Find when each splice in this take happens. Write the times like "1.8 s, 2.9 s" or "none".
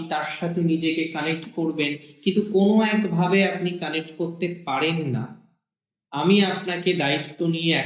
none